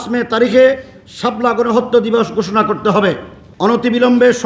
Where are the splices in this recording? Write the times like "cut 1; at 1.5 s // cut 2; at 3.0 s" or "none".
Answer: cut 1; at 3.4 s